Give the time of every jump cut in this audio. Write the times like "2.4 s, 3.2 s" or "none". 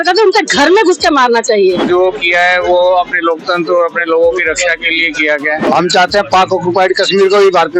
1.8 s, 5.6 s